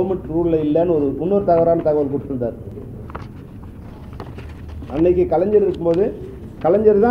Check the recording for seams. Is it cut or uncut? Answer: uncut